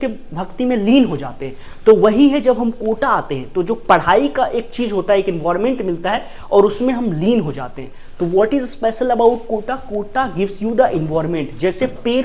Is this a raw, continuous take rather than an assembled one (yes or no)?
yes